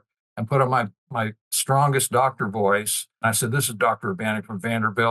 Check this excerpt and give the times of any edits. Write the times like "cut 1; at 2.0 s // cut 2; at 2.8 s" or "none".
cut 1; at 3.2 s